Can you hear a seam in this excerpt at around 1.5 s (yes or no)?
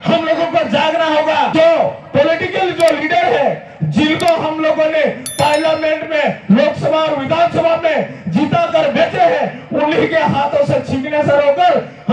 yes